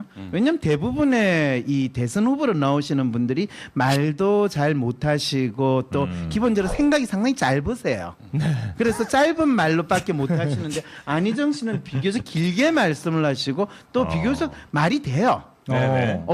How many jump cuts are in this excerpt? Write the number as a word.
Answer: one